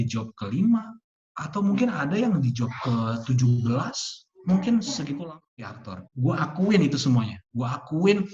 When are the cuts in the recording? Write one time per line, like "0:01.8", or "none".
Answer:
0:05.4